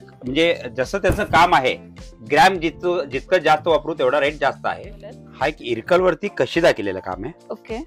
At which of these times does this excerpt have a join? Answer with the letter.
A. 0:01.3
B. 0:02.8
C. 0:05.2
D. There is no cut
C